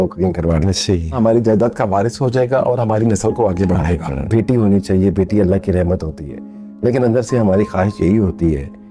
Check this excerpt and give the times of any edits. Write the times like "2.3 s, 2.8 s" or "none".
1.1 s, 4.3 s